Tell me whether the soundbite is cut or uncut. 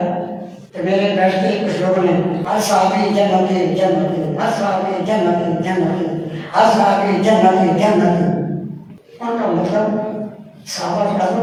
uncut